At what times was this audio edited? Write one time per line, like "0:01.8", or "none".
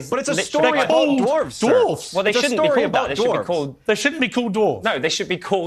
none